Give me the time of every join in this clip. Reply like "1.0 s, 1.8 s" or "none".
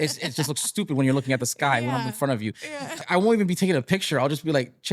3.0 s